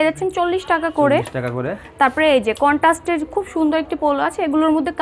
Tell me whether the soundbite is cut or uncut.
uncut